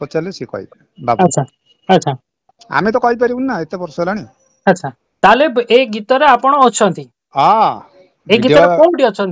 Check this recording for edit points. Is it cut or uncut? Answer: cut